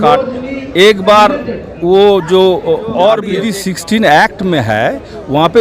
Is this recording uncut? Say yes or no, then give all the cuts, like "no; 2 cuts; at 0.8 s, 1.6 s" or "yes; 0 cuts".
no; 1 cut; at 3.4 s